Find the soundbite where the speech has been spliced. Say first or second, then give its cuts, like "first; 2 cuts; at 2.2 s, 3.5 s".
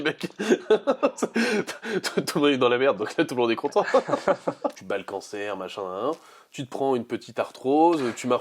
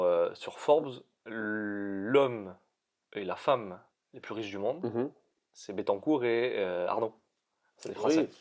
first; 1 cut; at 4.8 s